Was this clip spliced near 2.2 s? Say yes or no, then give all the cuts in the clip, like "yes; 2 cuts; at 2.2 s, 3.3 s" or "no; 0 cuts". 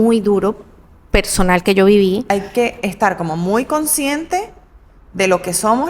yes; 1 cut; at 2.2 s